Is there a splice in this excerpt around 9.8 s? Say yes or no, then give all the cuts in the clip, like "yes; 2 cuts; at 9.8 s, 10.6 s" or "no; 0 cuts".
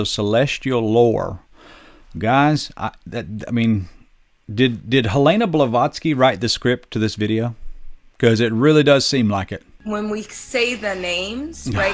yes; 1 cut; at 9.8 s